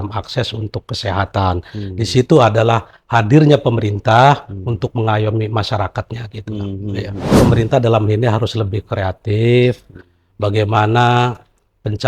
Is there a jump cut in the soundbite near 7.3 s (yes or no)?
yes